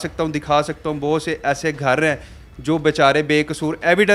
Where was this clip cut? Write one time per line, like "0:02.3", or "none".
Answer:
none

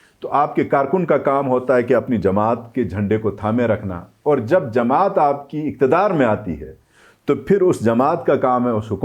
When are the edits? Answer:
none

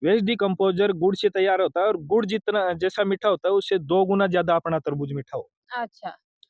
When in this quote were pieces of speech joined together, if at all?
none

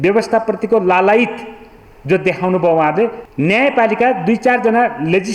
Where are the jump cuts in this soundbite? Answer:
0:03.2

